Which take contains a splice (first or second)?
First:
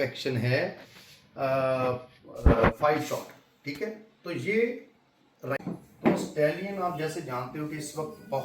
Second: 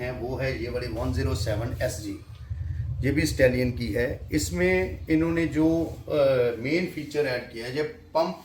first